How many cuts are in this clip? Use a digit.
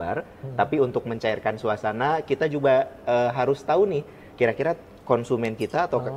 0